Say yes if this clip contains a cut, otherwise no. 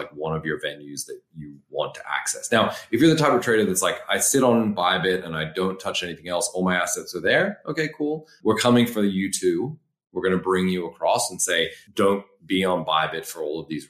yes